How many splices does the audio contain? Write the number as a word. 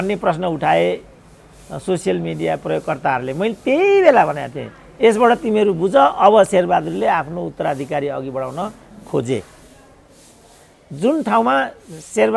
zero